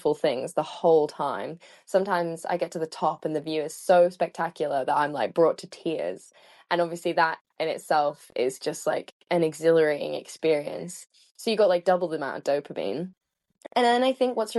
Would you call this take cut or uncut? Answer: uncut